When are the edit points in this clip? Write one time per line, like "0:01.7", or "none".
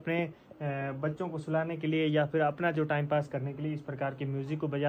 none